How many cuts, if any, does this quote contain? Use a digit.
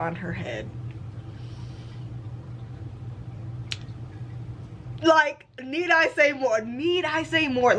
0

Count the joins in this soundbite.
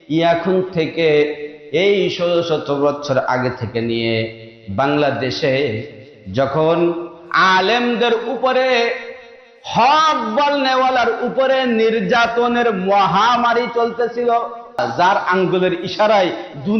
1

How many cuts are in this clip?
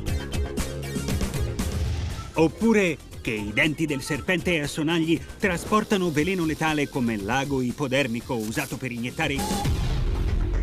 0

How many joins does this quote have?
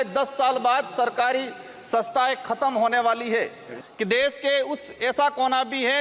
1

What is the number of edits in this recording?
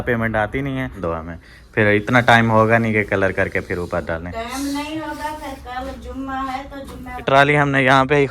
2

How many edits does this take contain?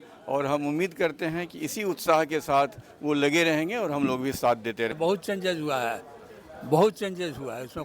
1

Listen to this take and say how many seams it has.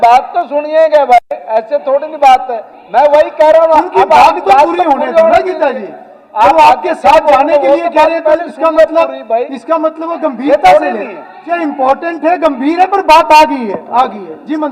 1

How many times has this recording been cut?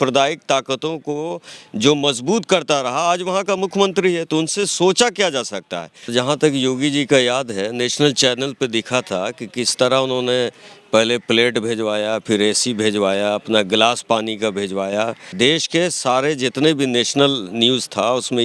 2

